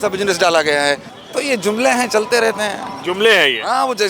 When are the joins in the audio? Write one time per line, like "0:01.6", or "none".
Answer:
0:01.1